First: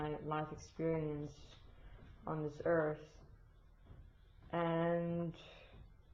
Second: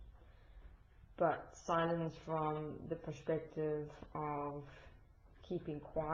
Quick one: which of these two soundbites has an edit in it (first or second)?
second